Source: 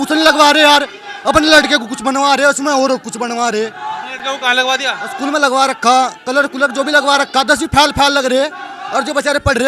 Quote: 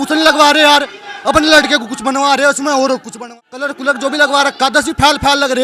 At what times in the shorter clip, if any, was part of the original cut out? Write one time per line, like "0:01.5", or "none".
0:03.4